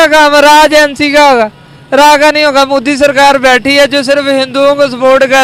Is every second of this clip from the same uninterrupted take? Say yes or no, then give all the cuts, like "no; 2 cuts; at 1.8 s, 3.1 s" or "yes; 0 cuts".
yes; 0 cuts